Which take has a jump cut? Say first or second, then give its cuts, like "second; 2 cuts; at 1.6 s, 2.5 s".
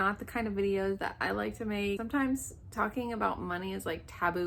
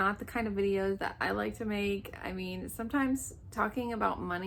first; 1 cut; at 2.0 s